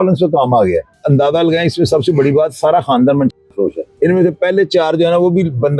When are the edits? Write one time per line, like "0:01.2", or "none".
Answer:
0:01.0
0:03.8